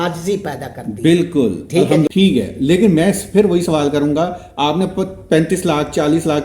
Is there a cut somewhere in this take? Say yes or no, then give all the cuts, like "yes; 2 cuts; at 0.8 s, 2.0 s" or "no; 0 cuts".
yes; 1 cut; at 2.1 s